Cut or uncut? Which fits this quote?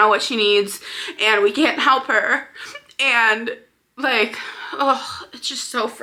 uncut